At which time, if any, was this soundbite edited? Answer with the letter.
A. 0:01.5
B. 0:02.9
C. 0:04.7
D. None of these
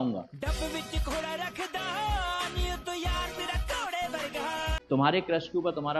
C